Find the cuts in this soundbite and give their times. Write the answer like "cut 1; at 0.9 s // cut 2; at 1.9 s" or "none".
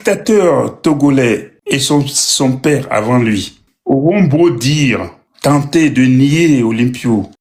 none

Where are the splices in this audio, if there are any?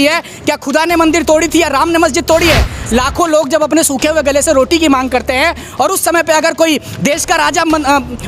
cut 1; at 2.7 s

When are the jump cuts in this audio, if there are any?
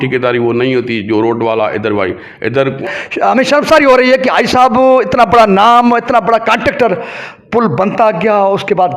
cut 1; at 2.8 s

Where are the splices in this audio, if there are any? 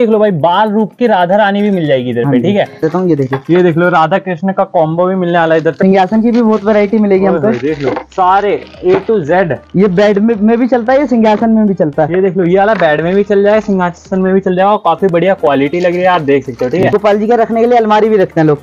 cut 1; at 2.8 s // cut 2; at 5.8 s // cut 3; at 16.8 s

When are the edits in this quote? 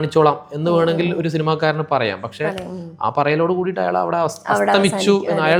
none

